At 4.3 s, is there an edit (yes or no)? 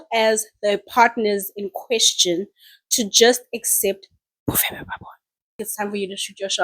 no